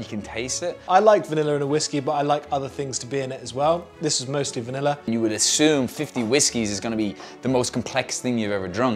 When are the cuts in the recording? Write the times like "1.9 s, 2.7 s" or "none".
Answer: 0.8 s, 5.1 s